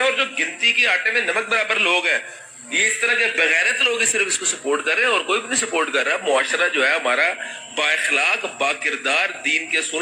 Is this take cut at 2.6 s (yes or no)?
no